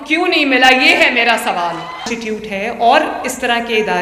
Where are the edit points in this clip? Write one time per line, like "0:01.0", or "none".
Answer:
0:02.1